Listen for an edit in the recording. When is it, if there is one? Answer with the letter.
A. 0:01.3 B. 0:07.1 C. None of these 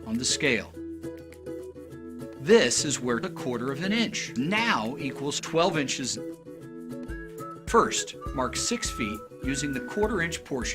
B